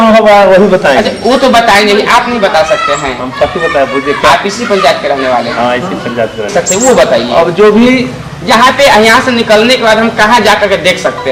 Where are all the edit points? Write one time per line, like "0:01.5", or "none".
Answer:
0:06.5